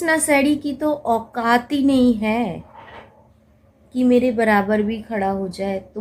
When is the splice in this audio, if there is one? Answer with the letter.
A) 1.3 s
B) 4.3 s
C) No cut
C